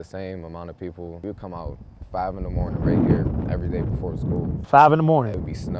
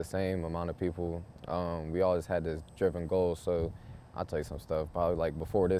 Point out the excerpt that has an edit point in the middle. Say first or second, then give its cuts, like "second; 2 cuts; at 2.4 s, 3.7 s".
first; 1 cut; at 1.2 s